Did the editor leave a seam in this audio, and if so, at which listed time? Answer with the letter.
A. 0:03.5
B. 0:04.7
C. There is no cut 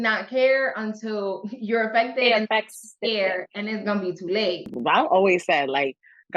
B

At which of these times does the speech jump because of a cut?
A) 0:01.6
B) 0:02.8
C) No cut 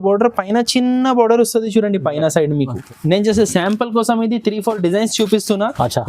B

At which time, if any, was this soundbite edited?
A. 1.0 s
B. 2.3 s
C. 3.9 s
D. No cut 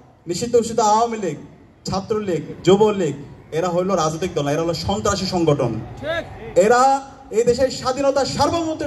D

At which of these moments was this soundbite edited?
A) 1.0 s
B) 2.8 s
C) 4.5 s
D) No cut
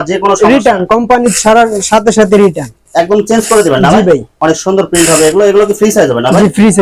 D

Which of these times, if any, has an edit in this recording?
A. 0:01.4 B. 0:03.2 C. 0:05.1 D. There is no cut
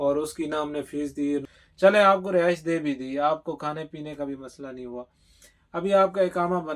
A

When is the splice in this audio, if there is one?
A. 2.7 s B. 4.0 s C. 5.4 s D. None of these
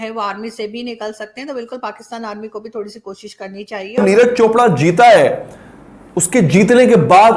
B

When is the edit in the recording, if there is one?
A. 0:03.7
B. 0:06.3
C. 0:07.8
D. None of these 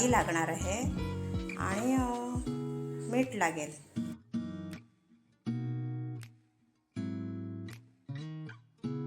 A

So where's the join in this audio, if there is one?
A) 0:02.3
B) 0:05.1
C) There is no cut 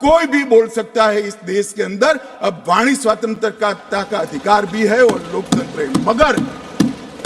C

